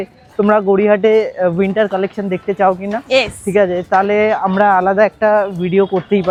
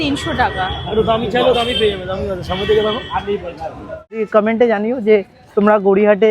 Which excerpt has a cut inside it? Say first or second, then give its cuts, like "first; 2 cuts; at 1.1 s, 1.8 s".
second; 1 cut; at 4.2 s